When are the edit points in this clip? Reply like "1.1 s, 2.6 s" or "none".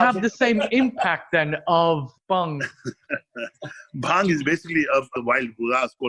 2.1 s, 5.1 s